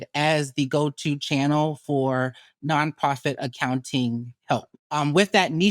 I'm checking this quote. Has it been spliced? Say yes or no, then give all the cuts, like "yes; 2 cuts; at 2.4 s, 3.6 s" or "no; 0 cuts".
yes; 1 cut; at 4.8 s